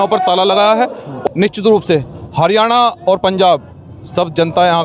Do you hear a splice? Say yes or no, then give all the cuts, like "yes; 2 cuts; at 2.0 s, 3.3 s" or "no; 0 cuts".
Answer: yes; 1 cut; at 1.1 s